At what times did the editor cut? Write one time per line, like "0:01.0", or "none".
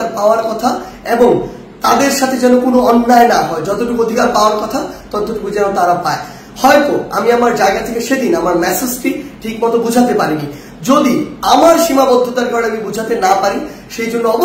none